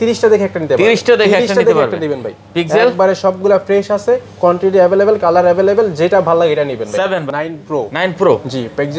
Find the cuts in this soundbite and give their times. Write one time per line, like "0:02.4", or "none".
0:07.2